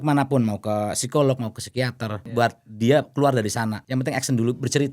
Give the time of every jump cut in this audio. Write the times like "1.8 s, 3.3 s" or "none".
2.2 s, 3.8 s